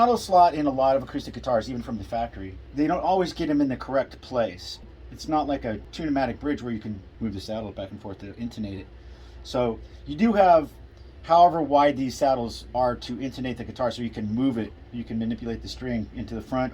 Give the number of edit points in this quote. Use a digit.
3